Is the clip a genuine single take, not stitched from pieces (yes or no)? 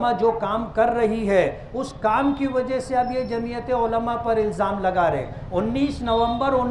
yes